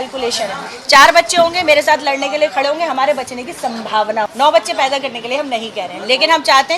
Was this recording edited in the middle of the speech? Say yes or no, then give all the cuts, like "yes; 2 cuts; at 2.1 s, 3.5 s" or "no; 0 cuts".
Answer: yes; 1 cut; at 4.3 s